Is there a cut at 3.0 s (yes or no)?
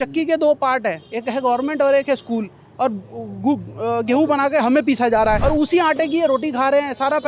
no